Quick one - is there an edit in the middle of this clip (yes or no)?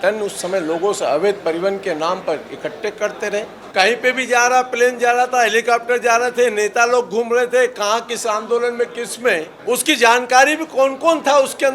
yes